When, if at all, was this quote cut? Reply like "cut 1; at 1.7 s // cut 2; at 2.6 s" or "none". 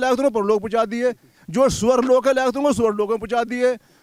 none